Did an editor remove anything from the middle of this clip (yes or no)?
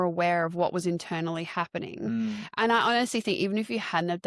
no